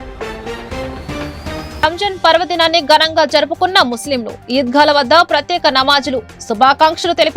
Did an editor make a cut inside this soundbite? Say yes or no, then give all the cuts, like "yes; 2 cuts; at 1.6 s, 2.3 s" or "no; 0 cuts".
yes; 1 cut; at 1.7 s